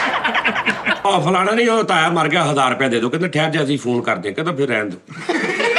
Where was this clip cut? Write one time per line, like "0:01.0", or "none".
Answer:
0:01.0